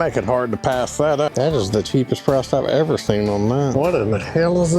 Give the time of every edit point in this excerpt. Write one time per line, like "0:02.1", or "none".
0:01.3
0:03.7